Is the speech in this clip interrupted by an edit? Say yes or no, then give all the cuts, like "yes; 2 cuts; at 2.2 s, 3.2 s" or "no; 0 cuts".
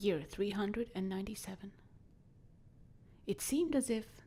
no; 0 cuts